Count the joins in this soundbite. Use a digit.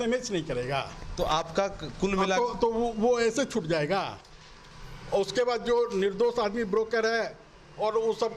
0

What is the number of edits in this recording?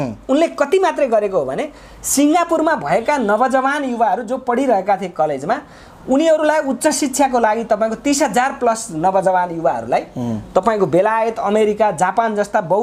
0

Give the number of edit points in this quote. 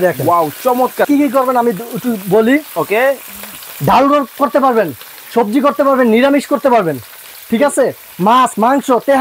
1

